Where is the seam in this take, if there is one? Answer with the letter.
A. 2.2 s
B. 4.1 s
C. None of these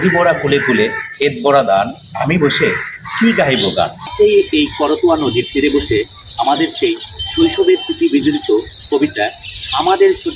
B